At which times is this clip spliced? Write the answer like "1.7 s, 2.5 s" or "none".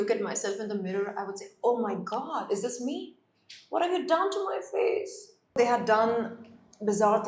5.6 s

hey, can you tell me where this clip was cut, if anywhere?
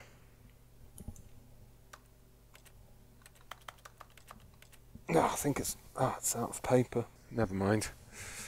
7.1 s

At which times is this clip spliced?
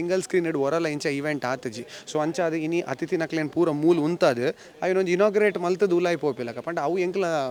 none

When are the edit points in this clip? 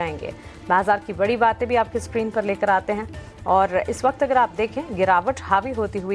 none

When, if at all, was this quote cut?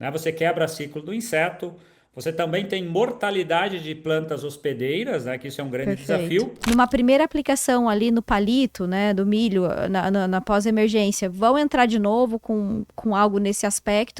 6.3 s

